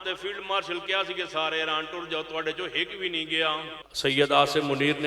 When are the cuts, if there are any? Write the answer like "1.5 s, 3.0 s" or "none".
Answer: 3.8 s